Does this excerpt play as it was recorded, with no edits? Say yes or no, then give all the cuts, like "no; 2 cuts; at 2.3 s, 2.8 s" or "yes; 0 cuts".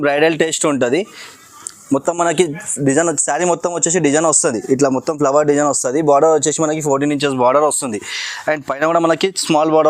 yes; 0 cuts